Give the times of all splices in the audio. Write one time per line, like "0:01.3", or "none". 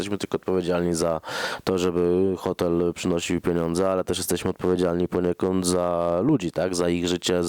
none